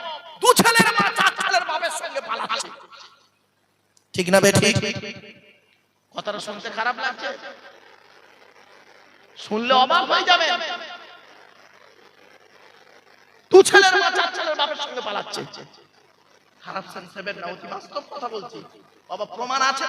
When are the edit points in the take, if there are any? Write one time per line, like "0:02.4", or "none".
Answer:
none